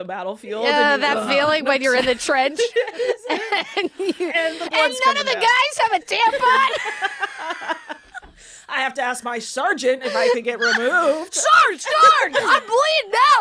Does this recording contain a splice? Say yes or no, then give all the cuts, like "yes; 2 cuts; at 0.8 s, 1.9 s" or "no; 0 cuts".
no; 0 cuts